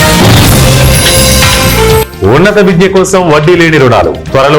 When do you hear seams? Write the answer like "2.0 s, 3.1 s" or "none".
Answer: 2.1 s